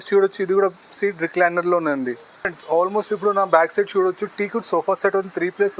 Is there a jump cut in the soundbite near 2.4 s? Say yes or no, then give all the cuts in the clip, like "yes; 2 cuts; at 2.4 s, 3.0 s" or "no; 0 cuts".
yes; 1 cut; at 2.4 s